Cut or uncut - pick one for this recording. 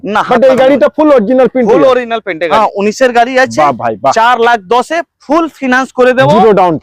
cut